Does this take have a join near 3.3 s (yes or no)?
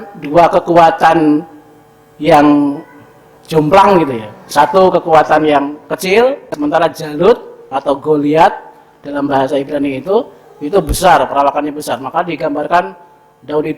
no